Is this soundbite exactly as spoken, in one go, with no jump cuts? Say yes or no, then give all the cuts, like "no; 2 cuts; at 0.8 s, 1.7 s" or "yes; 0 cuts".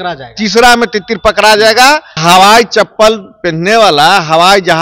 no; 1 cut; at 2.2 s